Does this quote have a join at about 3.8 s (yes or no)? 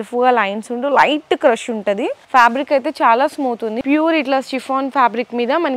yes